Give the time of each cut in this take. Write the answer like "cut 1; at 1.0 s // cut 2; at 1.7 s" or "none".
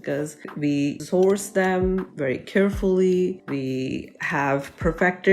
none